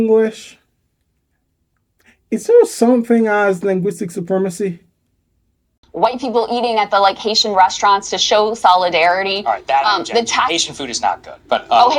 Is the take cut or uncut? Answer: cut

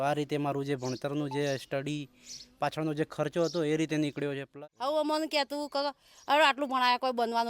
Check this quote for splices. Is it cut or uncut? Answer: cut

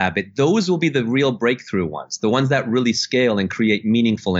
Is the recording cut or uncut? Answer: uncut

